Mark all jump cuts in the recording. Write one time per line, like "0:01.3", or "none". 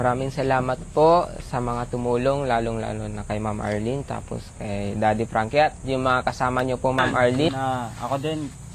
0:07.5